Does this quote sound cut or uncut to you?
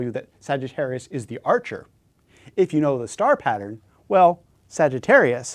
cut